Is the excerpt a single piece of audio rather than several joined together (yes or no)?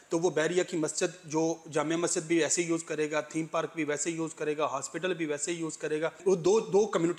no